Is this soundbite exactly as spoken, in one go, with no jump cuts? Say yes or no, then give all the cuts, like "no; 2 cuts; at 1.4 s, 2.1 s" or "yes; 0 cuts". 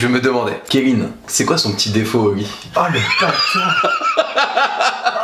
yes; 0 cuts